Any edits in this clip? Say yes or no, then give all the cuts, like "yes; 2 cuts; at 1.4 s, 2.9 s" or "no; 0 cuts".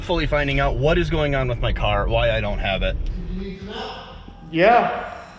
yes; 1 cut; at 3.1 s